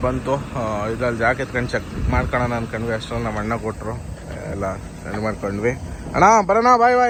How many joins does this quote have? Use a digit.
0